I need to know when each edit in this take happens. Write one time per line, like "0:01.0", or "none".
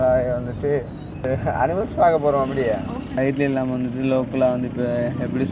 0:01.2
0:03.0